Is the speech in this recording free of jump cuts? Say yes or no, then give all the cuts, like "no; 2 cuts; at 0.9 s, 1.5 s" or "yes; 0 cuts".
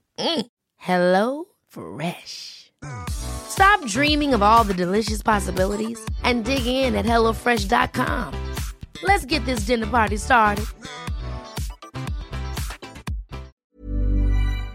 no; 1 cut; at 13.6 s